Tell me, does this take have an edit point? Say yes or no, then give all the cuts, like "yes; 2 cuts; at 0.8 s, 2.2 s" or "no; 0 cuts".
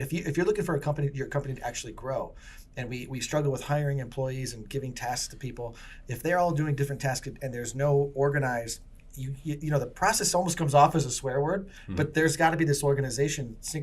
no; 0 cuts